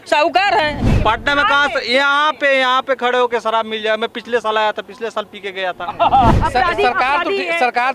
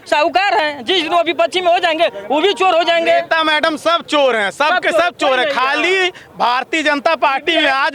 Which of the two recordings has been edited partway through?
first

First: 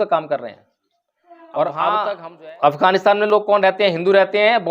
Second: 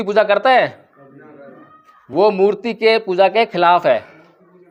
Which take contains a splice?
first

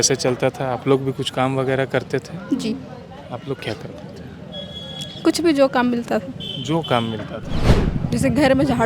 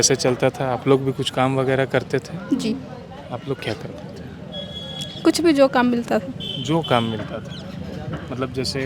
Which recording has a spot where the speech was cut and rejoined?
first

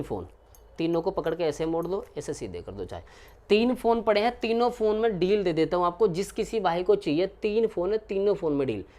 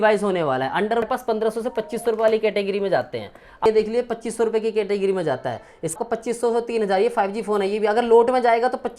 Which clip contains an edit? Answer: second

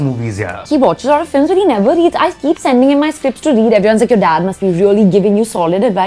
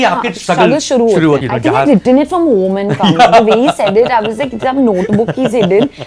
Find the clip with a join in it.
second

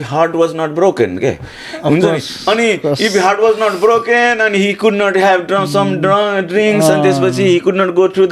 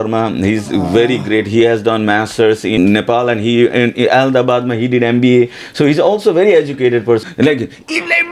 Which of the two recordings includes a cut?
second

